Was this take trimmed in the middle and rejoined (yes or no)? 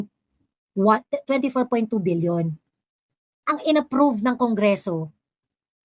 no